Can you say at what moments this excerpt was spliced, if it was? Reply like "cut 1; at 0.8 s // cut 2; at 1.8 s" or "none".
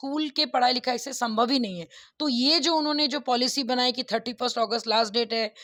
none